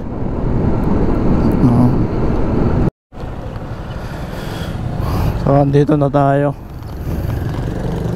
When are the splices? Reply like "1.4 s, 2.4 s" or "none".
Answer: none